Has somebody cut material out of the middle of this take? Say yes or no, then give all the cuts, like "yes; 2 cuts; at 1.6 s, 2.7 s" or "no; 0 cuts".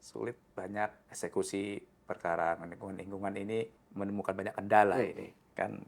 yes; 2 cuts; at 1.0 s, 3.8 s